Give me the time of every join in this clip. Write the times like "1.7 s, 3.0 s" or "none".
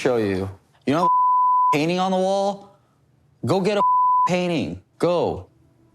4.8 s